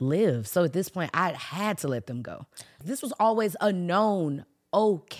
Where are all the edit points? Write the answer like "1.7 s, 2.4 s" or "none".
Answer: 2.8 s